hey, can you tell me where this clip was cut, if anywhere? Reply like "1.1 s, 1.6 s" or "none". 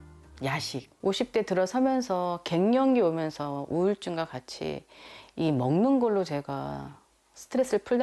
0.9 s